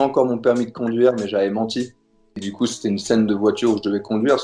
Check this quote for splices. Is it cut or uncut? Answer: cut